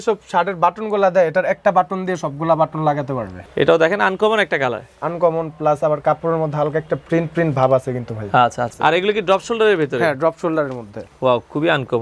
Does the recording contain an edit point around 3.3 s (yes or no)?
yes